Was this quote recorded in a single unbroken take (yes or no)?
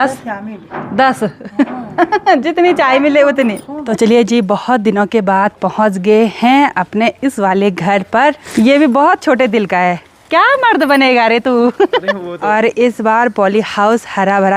no